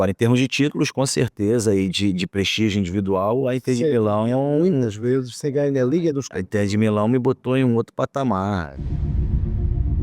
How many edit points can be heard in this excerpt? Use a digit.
1